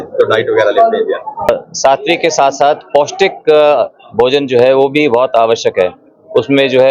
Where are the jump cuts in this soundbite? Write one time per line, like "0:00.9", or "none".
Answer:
0:01.5